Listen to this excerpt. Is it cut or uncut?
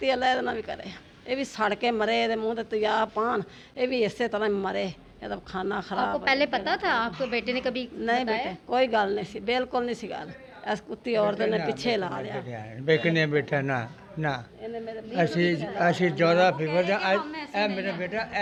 uncut